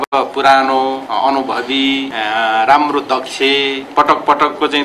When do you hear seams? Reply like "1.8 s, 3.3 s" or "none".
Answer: 1.0 s, 2.1 s, 3.8 s